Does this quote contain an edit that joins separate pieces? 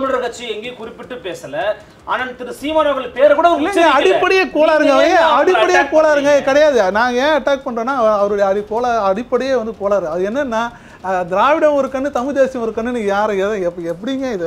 no; 0 cuts

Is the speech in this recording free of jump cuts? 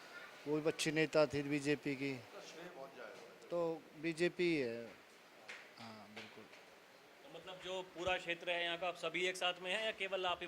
yes; 0 cuts

